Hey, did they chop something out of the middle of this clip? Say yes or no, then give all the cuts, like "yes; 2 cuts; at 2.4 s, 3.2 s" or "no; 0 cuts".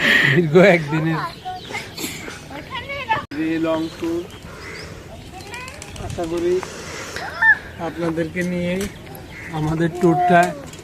yes; 1 cut; at 3.3 s